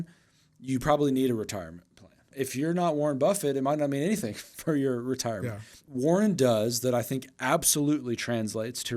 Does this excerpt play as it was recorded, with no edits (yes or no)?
no